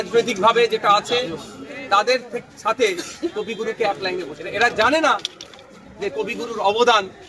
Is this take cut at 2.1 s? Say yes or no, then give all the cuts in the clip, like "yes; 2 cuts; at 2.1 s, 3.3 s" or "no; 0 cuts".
no; 1 cut; at 4.4 s